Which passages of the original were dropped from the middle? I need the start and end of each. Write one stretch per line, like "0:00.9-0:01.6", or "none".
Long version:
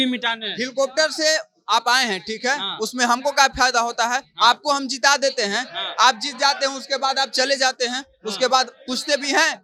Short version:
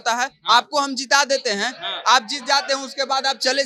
none